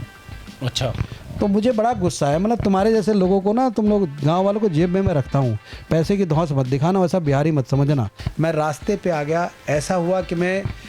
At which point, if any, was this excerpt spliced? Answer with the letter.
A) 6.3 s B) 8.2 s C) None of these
B